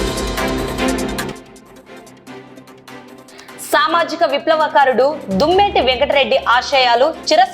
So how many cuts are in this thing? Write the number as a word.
three